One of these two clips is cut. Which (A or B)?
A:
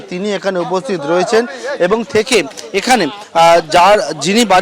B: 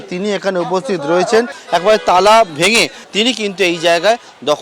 B